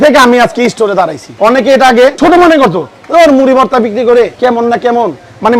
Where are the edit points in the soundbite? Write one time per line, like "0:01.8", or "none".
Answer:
0:01.2
0:02.2
0:04.3